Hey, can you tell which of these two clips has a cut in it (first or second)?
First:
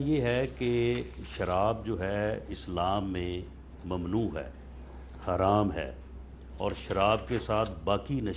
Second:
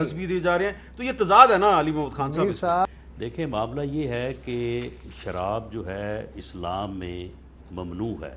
second